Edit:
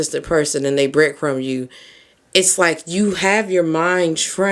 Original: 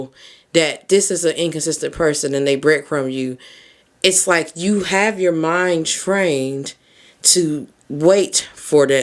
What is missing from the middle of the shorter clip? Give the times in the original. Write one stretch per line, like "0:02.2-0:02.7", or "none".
none